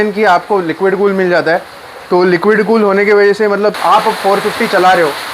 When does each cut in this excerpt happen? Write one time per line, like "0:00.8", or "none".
0:03.8